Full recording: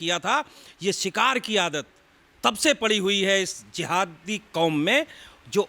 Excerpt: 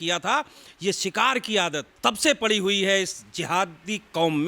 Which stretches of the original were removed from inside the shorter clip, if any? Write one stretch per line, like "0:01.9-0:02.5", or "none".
0:01.9-0:02.3